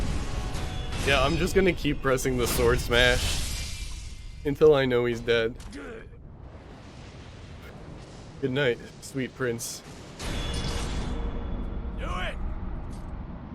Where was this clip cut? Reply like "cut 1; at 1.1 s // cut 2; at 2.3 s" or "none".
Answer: cut 1; at 7.7 s